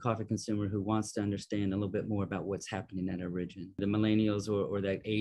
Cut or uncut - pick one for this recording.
cut